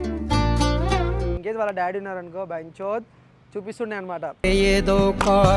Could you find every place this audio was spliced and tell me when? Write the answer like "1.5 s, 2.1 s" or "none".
1.4 s